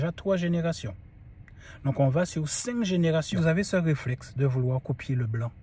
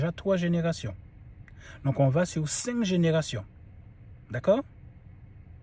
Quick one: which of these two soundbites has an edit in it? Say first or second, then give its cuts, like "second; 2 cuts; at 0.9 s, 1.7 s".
first; 1 cut; at 3.4 s